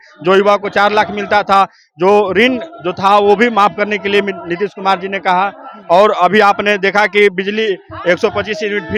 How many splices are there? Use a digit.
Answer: 0